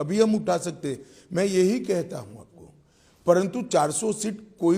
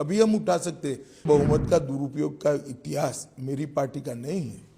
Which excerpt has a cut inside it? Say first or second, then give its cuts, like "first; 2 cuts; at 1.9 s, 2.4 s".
second; 1 cut; at 1.2 s